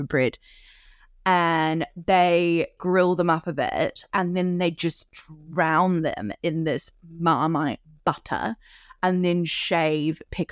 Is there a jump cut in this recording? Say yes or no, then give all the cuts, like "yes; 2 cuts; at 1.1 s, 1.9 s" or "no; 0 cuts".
yes; 1 cut; at 2.8 s